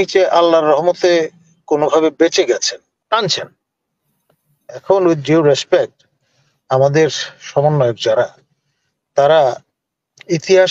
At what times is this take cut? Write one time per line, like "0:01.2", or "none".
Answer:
0:02.9

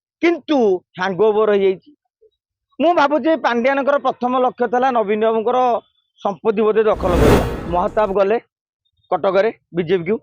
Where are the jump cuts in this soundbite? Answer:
0:07.5

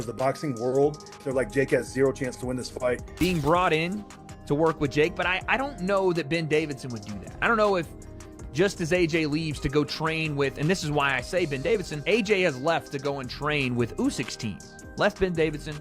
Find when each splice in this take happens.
0:03.1

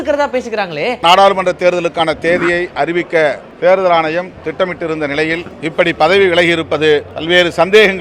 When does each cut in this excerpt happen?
0:01.0
0:03.5
0:05.5
0:07.1

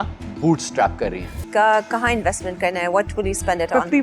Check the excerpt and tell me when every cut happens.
0:01.4

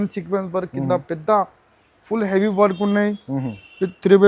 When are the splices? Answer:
none

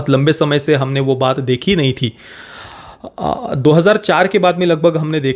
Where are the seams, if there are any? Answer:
none

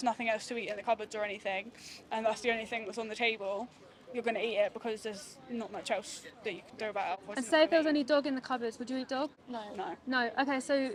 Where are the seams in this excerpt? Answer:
none

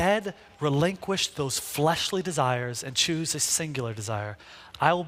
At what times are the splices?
none

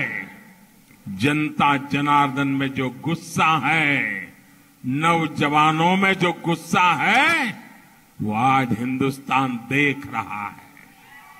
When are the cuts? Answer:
0:08.7

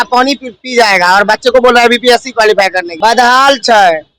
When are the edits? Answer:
0:02.8

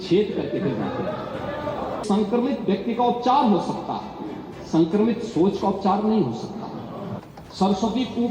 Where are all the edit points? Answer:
0:02.0
0:07.2

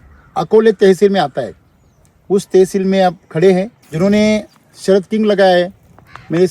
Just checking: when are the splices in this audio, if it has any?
0:03.8

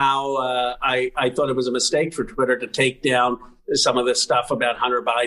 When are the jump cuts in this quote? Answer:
none

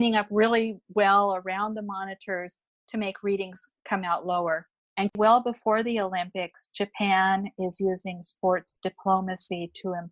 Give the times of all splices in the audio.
0:05.2

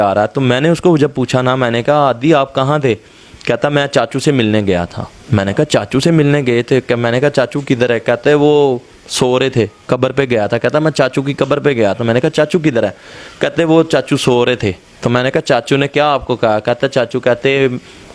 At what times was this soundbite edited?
none

